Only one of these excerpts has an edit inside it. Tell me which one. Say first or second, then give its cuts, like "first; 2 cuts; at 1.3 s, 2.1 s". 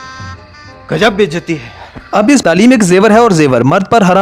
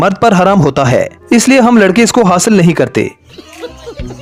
first; 1 cut; at 2.4 s